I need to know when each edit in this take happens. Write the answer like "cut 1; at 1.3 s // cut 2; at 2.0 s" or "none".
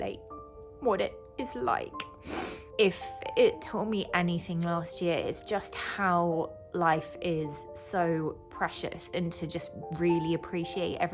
cut 1; at 2.6 s